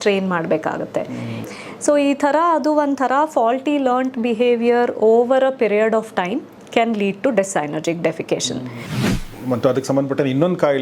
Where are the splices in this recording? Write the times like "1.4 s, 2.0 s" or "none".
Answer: 1.4 s, 9.2 s